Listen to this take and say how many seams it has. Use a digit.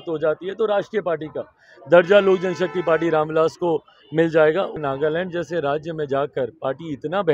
1